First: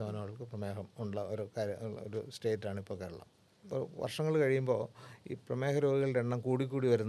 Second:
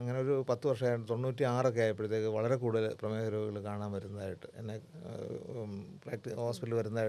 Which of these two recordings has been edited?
first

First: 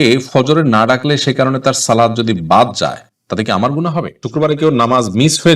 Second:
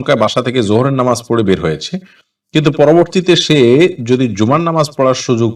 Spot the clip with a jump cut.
first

